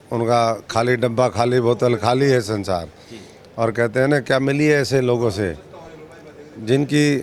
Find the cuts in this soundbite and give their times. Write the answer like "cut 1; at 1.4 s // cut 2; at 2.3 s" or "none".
none